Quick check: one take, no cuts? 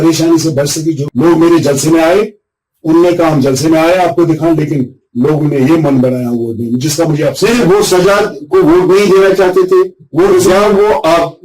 no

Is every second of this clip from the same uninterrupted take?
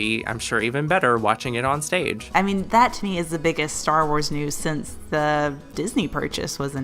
no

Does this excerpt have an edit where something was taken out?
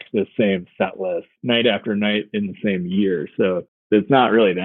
yes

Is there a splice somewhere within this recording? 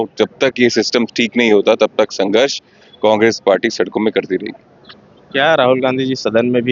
no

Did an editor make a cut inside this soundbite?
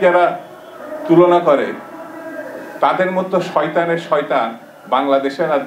no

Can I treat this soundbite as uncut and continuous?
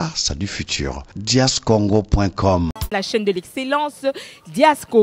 no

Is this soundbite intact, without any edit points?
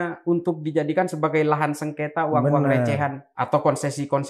no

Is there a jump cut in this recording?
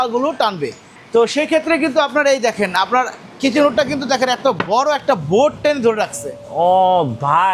no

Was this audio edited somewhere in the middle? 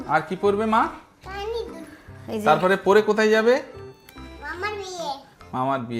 no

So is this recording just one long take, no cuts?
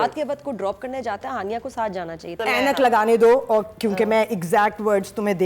no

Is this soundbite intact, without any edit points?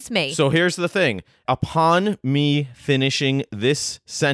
no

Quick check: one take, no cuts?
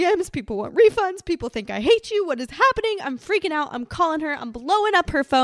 yes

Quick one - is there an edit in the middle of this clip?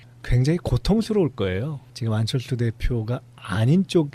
yes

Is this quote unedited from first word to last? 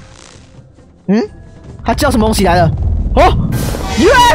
yes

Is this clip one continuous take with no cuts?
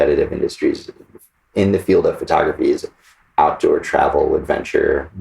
no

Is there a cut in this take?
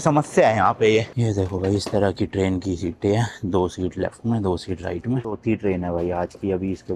yes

